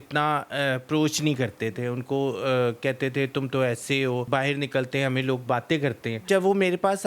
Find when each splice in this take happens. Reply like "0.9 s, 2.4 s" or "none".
4.3 s, 6.3 s